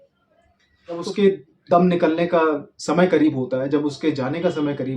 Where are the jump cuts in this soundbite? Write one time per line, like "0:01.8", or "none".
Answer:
0:01.0